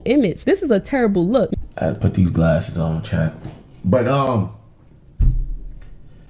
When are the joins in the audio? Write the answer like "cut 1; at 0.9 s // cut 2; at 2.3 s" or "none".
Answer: cut 1; at 1.5 s